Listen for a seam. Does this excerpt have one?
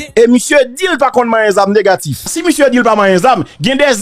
yes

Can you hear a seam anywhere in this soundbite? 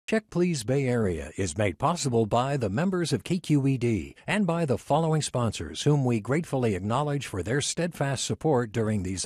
no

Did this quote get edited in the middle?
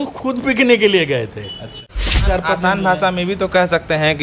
yes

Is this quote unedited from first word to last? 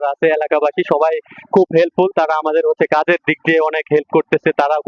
yes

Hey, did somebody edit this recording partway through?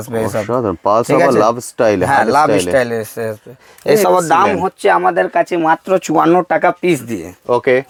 no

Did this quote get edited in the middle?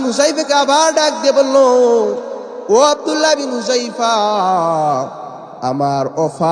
no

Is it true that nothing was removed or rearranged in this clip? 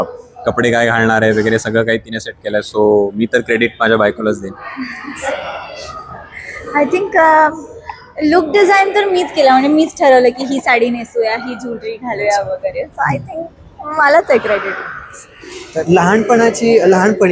yes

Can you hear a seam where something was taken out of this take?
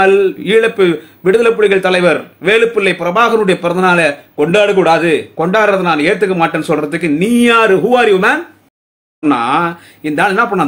yes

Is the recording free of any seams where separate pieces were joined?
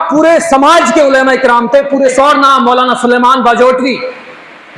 no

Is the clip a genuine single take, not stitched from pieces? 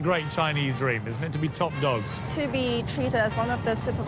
no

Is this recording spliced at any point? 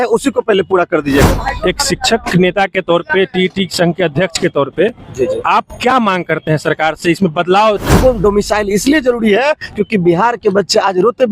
yes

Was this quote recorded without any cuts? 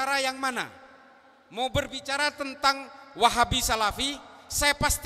yes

